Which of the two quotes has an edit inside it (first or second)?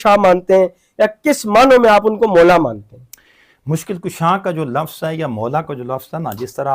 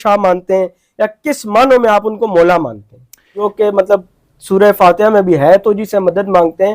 second